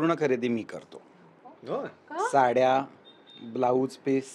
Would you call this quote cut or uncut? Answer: uncut